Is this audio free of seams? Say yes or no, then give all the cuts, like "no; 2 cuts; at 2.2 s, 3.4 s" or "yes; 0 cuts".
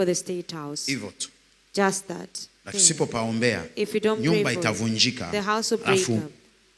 no; 1 cut; at 2.7 s